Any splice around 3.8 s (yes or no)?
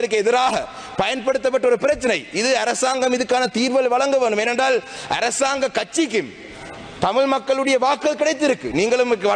no